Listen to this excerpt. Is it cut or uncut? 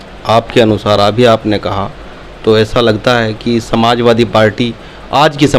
uncut